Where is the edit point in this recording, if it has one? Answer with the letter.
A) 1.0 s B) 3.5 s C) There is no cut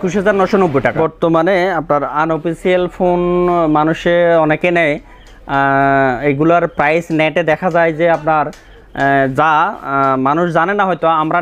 A